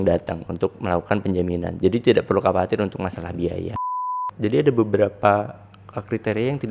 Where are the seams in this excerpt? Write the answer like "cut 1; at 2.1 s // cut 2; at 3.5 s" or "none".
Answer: cut 1; at 4.0 s